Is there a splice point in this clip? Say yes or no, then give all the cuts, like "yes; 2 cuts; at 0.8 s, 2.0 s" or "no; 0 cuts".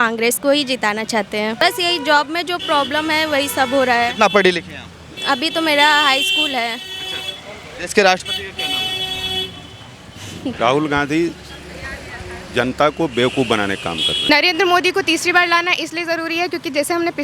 yes; 3 cuts; at 1.6 s, 10.5 s, 14.3 s